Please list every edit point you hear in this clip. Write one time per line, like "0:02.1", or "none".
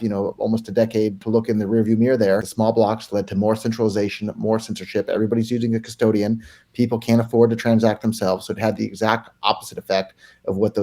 0:01.2
0:02.5